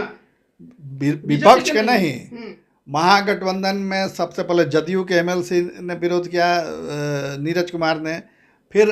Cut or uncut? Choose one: uncut